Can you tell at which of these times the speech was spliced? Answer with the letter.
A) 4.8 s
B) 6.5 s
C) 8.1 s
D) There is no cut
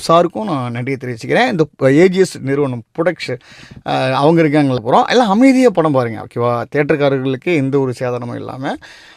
A